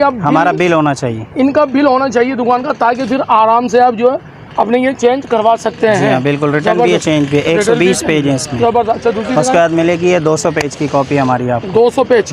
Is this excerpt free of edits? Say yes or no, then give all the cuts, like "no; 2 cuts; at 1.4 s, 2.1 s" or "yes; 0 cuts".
yes; 0 cuts